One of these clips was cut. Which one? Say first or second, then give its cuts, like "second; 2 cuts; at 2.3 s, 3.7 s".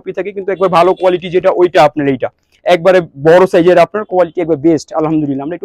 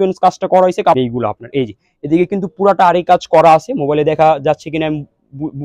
second; 1 cut; at 1.0 s